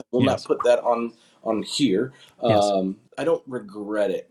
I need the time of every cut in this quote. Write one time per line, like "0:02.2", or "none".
0:03.0